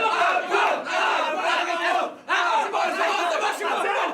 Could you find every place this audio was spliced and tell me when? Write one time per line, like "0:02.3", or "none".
none